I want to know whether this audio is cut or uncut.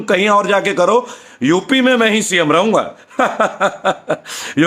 uncut